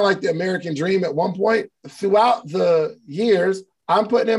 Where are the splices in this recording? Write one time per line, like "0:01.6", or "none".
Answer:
0:01.8